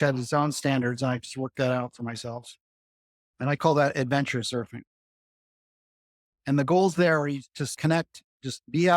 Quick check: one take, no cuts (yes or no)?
no